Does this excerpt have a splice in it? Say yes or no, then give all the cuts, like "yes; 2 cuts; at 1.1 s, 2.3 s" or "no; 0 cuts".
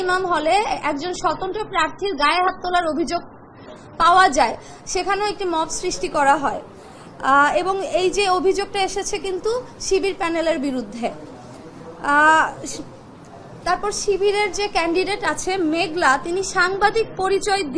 no; 0 cuts